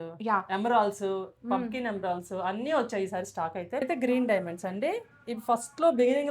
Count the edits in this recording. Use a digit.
1